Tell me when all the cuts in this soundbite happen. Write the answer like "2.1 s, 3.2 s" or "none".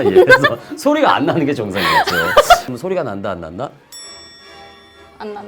2.7 s